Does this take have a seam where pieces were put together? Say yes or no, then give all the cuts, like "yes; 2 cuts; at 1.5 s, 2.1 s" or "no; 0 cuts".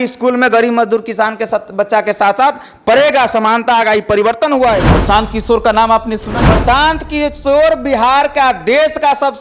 yes; 2 cuts; at 4.9 s, 6.5 s